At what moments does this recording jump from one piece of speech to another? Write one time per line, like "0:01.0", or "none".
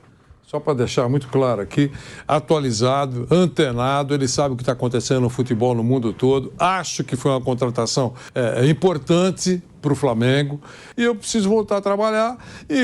0:08.2
0:10.8